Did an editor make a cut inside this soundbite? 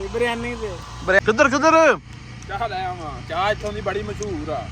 yes; 1 cut; at 1.2 s

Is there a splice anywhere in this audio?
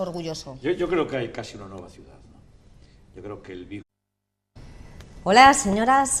no; 0 cuts

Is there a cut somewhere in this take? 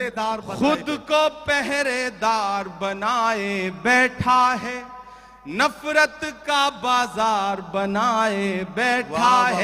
no; 0 cuts

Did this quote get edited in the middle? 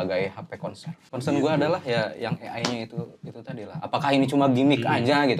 yes; 1 cut; at 1.1 s

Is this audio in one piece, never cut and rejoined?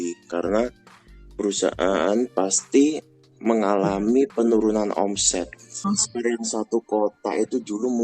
no; 1 cut; at 5.8 s

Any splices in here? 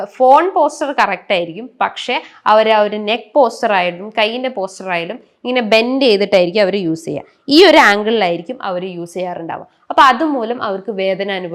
no; 0 cuts

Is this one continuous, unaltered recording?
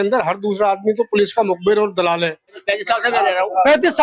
no; 1 cut; at 2.5 s

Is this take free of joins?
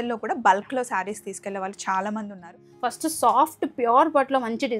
no; 1 cut; at 2.6 s

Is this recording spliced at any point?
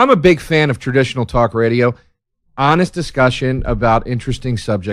no; 0 cuts

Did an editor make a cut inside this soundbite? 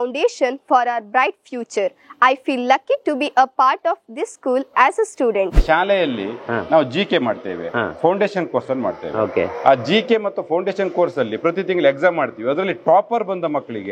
yes; 1 cut; at 5.6 s

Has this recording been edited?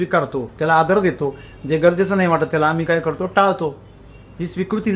no; 0 cuts

